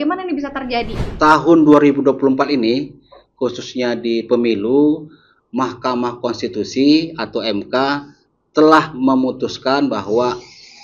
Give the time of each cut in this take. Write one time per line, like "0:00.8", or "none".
0:01.0